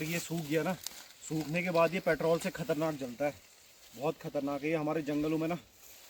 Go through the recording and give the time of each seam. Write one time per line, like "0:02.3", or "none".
none